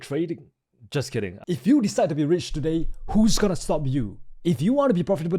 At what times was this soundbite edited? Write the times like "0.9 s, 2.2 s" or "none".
1.4 s